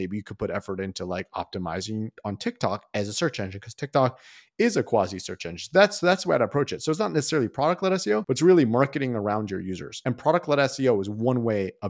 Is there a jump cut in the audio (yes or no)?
no